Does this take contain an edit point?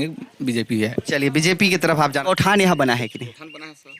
yes; 1 cut; at 2.2 s

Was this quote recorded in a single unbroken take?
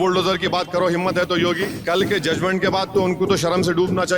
no; 1 cut; at 1.7 s

